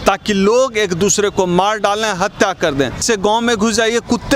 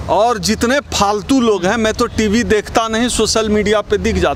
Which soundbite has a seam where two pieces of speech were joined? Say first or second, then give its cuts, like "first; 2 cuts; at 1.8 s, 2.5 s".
first; 1 cut; at 3.0 s